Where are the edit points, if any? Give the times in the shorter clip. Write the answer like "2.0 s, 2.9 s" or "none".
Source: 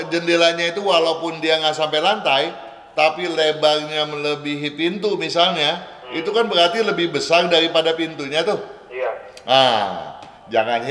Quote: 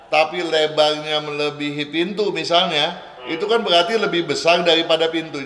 none